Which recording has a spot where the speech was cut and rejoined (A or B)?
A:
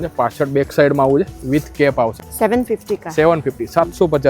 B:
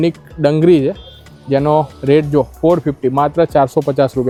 A